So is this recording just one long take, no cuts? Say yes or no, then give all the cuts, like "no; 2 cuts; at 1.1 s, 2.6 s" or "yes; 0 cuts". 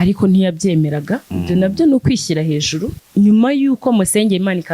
no; 1 cut; at 3.0 s